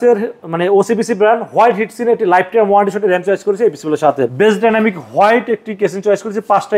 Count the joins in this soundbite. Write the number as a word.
one